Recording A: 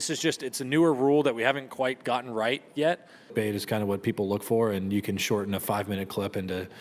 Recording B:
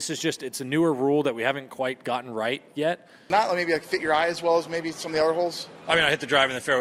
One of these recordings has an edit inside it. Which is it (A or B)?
A